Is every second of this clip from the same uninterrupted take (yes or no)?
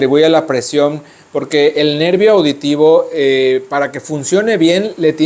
yes